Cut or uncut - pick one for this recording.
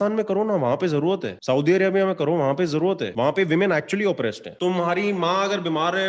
cut